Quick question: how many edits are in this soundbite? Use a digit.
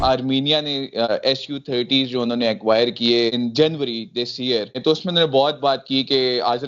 3